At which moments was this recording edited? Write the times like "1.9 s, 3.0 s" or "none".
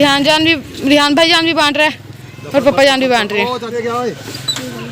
3.7 s